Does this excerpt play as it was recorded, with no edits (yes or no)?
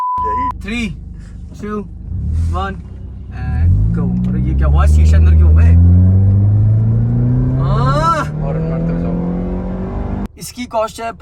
no